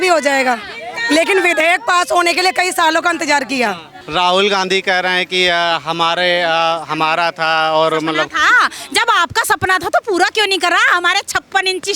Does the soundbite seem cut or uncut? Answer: cut